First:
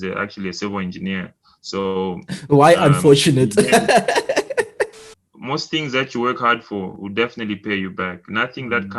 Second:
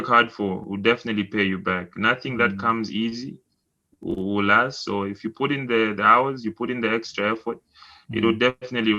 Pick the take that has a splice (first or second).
first